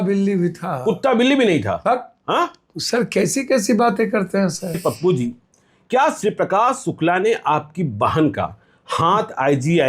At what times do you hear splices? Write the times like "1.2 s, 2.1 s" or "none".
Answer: 4.8 s